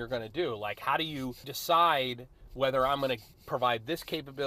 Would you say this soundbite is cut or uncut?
cut